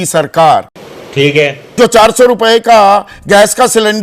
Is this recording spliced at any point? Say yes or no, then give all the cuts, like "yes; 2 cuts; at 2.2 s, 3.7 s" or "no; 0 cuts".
yes; 1 cut; at 1.0 s